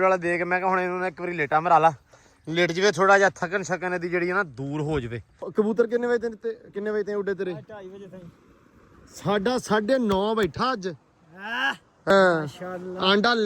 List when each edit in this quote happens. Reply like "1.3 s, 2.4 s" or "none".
5.5 s, 12.1 s